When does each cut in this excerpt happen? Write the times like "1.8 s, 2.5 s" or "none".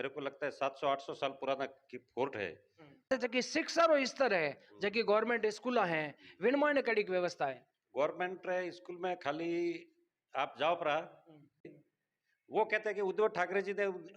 3.1 s, 11.5 s